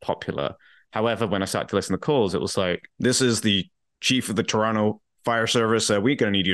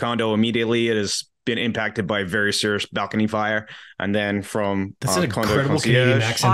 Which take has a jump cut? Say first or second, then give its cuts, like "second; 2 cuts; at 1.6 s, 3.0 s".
first; 1 cut; at 2.9 s